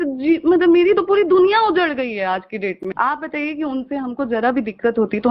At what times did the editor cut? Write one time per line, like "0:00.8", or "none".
0:02.8